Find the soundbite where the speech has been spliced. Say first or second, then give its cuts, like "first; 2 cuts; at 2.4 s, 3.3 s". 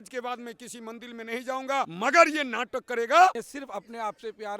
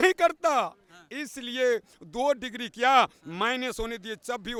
first; 2 cuts; at 1.9 s, 3.3 s